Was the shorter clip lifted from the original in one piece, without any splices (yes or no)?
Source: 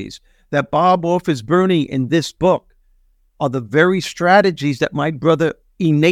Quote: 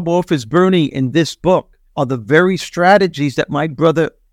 no